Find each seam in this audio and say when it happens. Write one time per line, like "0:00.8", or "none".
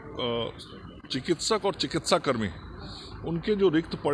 none